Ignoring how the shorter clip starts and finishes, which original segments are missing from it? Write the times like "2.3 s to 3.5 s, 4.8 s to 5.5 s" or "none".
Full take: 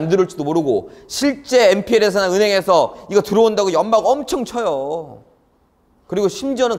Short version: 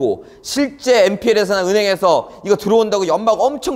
none